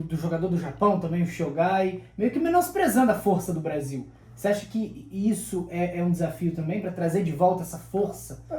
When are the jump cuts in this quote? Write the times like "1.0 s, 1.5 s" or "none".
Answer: none